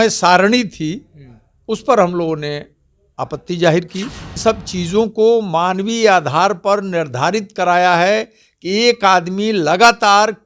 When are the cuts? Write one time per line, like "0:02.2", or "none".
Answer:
0:04.4